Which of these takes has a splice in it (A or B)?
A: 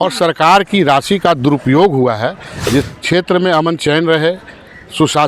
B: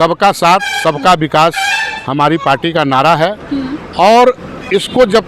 A